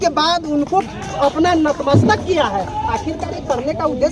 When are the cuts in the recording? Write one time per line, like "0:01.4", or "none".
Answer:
none